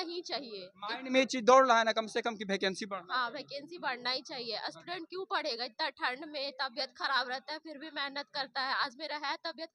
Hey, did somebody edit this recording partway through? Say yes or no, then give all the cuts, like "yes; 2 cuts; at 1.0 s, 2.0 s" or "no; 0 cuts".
no; 0 cuts